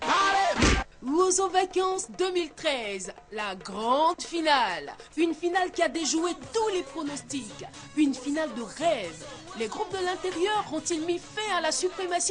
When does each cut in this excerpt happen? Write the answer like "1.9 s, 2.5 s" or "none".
0.9 s

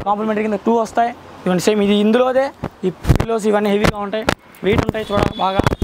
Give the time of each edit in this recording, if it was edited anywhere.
none

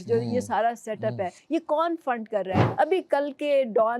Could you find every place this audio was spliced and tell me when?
1.4 s, 2.6 s

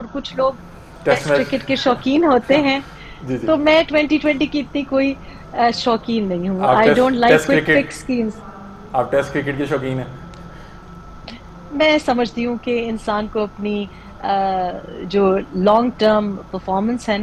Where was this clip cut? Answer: none

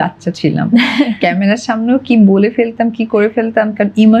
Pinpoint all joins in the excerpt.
none

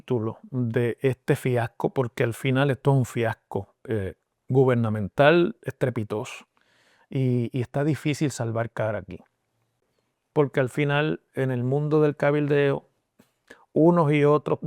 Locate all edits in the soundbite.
9.8 s

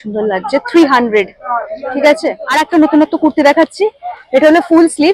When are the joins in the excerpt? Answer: 2.4 s

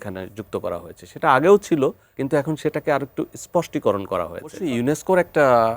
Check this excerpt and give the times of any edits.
2.1 s, 4.6 s

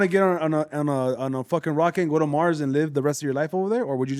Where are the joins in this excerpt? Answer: none

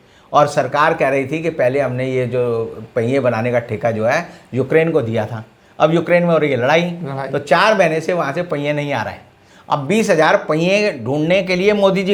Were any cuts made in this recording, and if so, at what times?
none

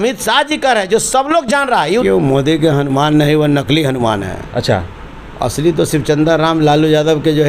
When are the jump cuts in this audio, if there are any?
2.0 s

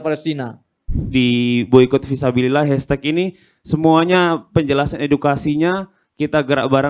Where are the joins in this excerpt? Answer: 0.9 s

